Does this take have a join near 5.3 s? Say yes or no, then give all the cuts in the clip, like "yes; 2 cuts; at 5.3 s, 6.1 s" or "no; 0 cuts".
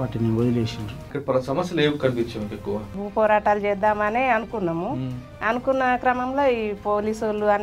no; 2 cuts; at 1.1 s, 3.0 s